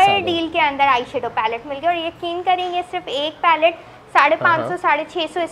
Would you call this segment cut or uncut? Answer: uncut